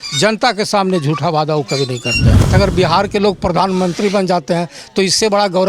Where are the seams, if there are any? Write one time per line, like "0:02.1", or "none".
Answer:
0:02.5

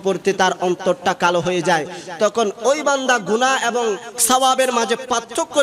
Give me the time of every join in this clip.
0:04.1

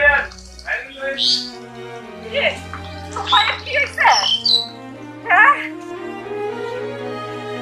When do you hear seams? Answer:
0:05.7

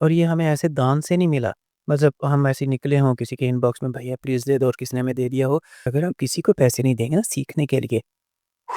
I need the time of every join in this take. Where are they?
0:05.9

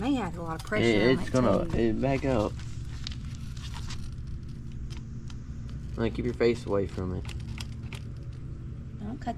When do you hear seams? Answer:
none

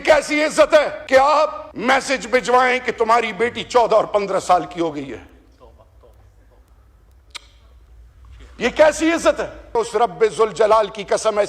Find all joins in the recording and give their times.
0:01.0
0:01.7
0:09.8

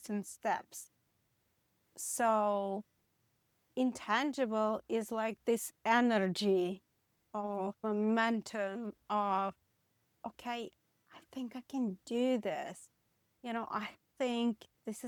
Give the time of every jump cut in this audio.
none

